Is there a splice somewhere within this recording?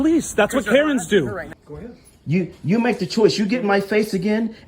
yes; 1 cut; at 1.5 s

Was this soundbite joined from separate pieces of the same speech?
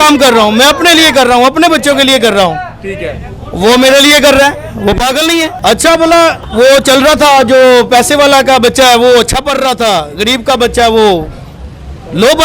yes; 2 cuts; at 5.5 s, 6.4 s

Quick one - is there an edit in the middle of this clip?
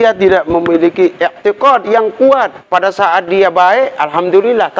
yes; 1 cut; at 2.6 s

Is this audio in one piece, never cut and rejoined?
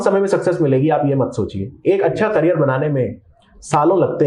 yes; 0 cuts

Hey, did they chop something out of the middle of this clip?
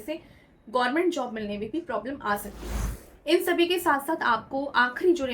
yes; 1 cut; at 3.0 s

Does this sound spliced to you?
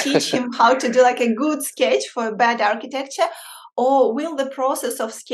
no; 0 cuts

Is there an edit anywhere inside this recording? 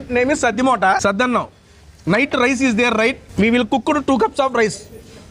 yes; 2 cuts; at 1.0 s, 3.2 s

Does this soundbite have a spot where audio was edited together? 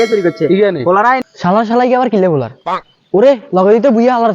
yes; 1 cut; at 1.2 s

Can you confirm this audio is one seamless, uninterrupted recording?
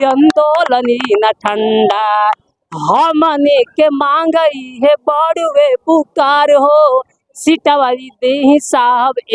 yes; 0 cuts

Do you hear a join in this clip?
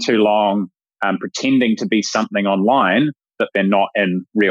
no; 0 cuts

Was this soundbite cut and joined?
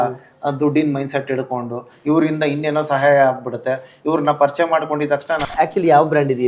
yes; 1 cut; at 5.4 s

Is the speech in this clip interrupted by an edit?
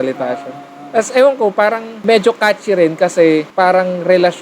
yes; 2 cuts; at 2.0 s, 3.5 s

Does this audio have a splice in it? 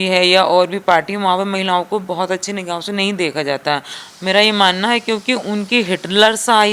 yes; 1 cut; at 4.0 s

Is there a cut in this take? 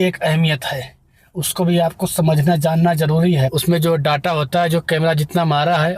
yes; 1 cut; at 3.5 s

